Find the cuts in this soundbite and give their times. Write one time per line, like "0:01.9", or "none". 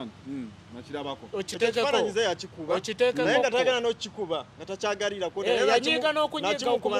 none

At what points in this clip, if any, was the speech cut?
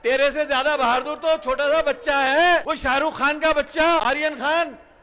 0:02.7
0:04.0

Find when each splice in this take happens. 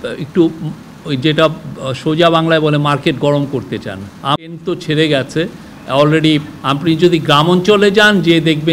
0:04.4

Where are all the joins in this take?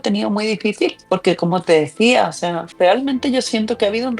0:01.0
0:02.6

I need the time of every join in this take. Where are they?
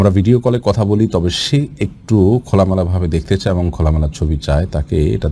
none

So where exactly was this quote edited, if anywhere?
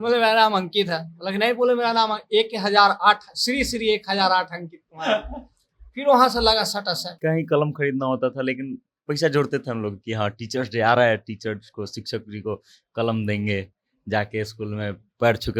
0:07.1

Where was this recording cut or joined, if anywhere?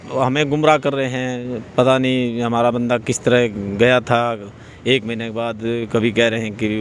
none

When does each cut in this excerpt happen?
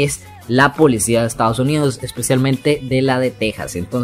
none

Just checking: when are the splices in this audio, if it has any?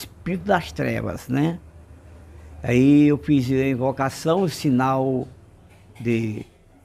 none

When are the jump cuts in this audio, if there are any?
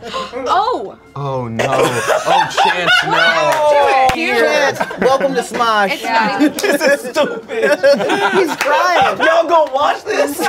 0:04.1
0:06.6

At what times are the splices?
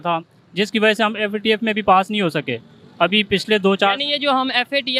none

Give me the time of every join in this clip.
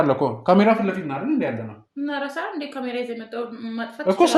none

